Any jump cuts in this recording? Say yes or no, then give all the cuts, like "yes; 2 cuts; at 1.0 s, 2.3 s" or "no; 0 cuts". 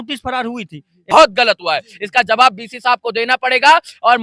yes; 1 cut; at 1.1 s